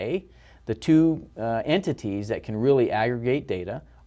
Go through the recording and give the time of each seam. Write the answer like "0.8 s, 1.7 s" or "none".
none

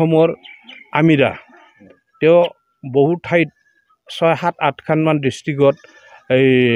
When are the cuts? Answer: none

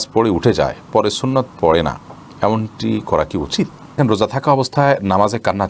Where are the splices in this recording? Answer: 4.0 s

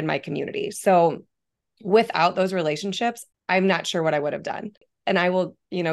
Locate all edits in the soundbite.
3.3 s, 4.9 s

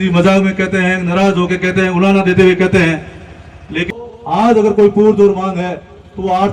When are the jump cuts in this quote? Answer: 3.9 s

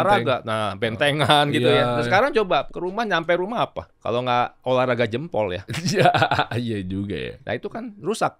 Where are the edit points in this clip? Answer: 2.7 s, 3.9 s, 7.4 s

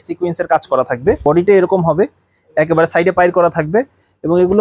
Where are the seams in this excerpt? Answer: 1.2 s

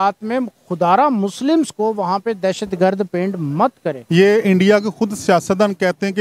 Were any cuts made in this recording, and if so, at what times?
3.9 s

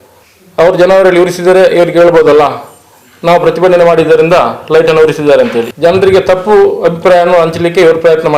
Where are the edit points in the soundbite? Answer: 5.7 s

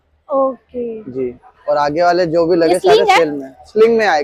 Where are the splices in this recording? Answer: none

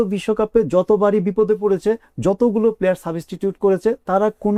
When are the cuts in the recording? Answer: none

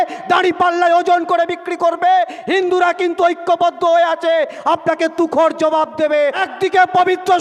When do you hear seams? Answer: 6.4 s

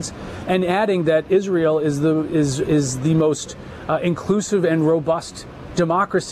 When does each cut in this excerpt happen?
none

